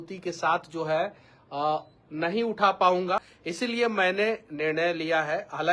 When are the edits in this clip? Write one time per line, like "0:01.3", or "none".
0:03.4